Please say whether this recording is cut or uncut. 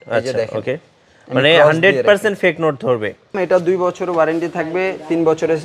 cut